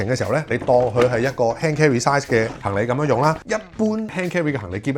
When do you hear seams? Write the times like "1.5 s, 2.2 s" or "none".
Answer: 3.4 s